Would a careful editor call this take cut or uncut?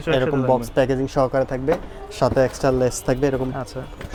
uncut